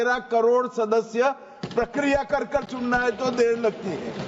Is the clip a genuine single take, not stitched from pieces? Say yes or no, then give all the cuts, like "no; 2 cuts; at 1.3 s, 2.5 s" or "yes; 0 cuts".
yes; 0 cuts